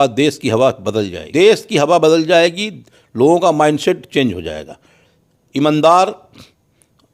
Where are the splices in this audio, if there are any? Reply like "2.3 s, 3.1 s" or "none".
1.2 s